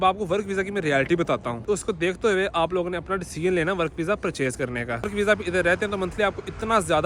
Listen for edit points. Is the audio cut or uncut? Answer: cut